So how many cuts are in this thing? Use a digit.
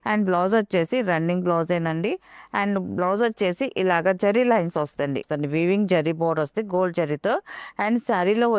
1